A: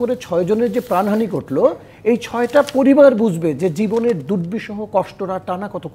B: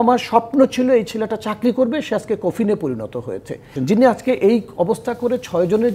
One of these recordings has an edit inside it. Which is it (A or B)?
B